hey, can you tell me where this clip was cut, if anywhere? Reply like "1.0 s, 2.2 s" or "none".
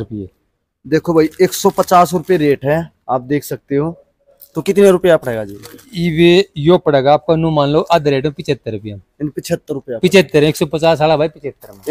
none